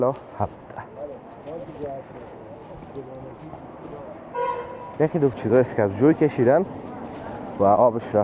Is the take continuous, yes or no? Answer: no